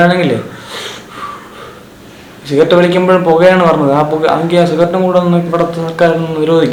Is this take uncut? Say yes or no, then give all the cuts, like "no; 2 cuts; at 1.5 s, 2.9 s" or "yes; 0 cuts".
yes; 0 cuts